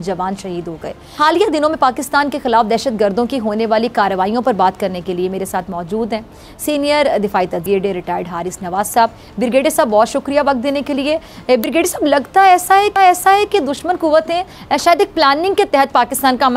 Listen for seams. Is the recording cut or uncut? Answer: uncut